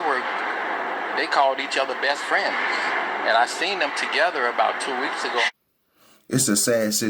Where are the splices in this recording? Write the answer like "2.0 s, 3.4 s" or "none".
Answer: 5.5 s

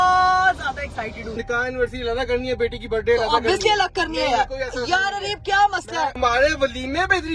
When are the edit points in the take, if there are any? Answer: 1.3 s, 6.1 s

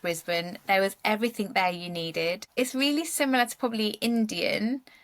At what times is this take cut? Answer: 2.5 s

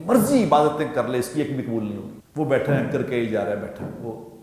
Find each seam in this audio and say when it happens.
2.2 s

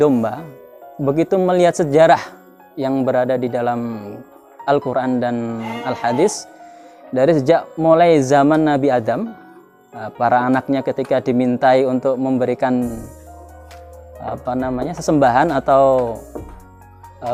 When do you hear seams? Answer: none

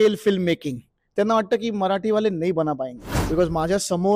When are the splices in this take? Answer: 3.1 s

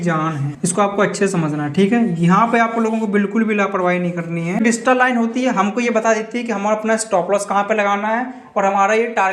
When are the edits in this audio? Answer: 4.6 s

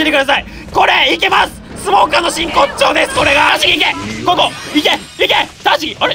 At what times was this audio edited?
3.5 s

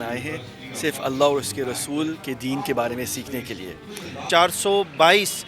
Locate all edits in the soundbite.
4.2 s

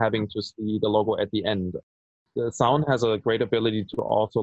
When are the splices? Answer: none

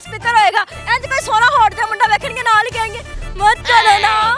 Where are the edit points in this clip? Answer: none

